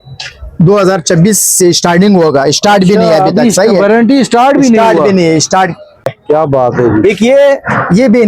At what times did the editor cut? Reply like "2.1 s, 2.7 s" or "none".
6.2 s